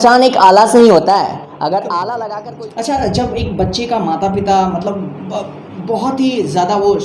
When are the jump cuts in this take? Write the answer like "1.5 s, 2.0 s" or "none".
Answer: 2.4 s